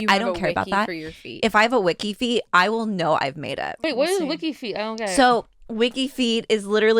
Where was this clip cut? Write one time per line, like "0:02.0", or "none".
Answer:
0:03.8